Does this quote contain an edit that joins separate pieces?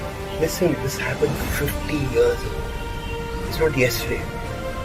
no; 0 cuts

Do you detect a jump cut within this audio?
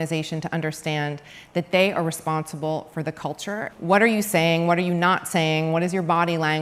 yes; 1 cut; at 3.7 s

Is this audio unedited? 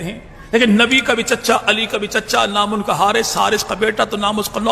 yes; 0 cuts

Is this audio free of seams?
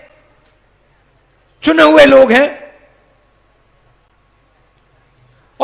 no; 1 cut; at 4.0 s

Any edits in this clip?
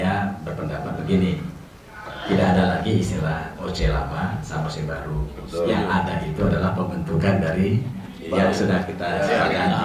no; 0 cuts

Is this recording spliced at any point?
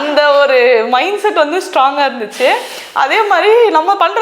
no; 0 cuts

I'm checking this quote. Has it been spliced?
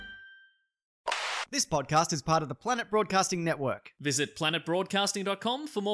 yes; 1 cut; at 1.2 s

